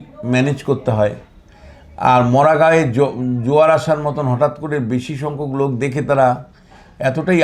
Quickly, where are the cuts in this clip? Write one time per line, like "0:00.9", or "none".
none